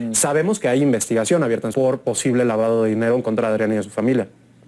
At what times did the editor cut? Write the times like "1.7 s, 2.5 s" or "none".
1.7 s